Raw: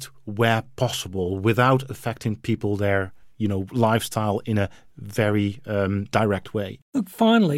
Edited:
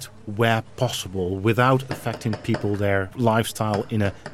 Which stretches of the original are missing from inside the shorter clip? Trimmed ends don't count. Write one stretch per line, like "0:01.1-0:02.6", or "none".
0:03.1-0:03.7